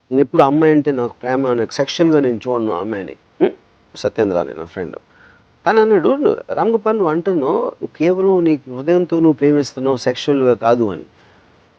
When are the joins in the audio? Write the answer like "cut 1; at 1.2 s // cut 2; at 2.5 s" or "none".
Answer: cut 1; at 4.0 s